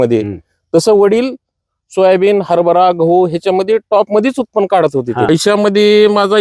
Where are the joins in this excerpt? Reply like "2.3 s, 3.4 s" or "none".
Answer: 5.3 s